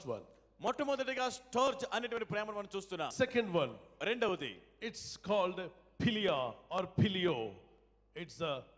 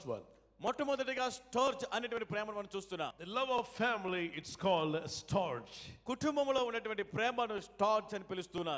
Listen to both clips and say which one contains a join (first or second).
first